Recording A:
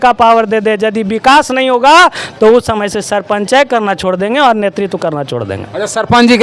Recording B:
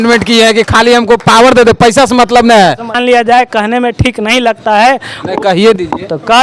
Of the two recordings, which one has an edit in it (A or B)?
B